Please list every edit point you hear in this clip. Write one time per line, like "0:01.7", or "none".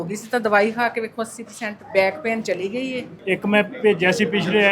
0:03.1